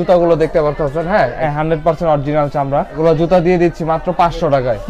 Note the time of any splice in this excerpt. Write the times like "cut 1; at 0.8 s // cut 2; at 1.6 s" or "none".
cut 1; at 1.4 s // cut 2; at 2.9 s